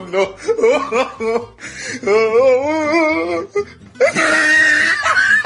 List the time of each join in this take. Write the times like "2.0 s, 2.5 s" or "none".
4.1 s